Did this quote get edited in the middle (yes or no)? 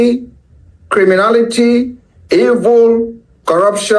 no